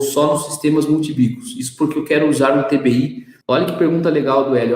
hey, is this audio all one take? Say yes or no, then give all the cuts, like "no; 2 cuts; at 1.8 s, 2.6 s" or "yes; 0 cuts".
no; 1 cut; at 3.3 s